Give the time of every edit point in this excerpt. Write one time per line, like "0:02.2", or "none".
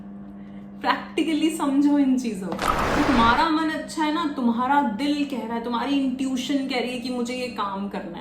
0:03.0